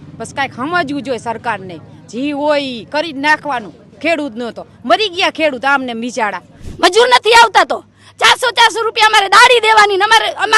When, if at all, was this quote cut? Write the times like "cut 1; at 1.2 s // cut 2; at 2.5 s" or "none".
cut 1; at 6.6 s